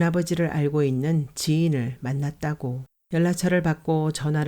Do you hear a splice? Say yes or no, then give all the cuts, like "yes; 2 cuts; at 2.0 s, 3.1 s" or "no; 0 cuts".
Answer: yes; 1 cut; at 2.9 s